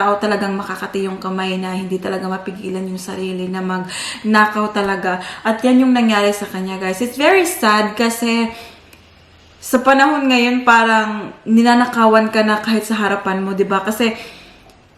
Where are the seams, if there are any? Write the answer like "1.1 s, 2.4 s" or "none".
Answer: none